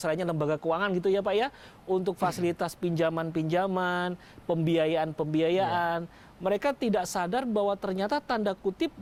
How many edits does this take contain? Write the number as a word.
zero